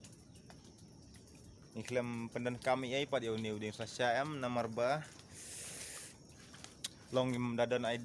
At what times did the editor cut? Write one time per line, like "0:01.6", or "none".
0:01.6

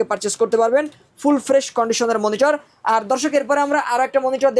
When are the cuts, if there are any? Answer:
none

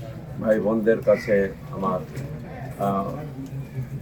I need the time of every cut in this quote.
none

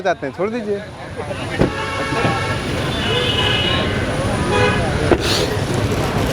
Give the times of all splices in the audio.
none

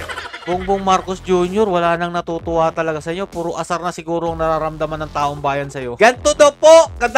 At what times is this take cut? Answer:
0:05.9

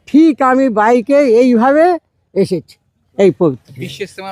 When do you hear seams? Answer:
none

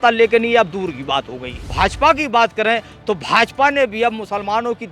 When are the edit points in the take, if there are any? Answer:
0:01.7

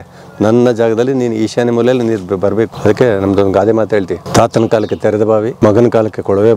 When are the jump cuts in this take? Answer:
0:02.7
0:04.2
0:05.5

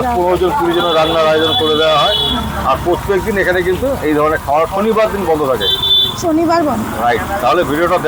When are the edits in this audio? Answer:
none

